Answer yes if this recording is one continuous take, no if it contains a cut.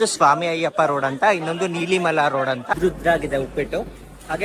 no